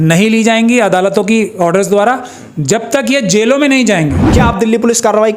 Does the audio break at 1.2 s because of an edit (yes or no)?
no